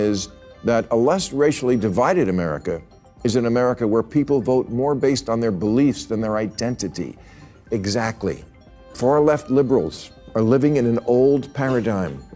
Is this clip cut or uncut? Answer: uncut